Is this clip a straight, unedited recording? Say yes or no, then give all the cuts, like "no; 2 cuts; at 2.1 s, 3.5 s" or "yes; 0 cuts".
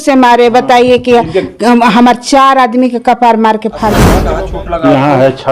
no; 1 cut; at 4.1 s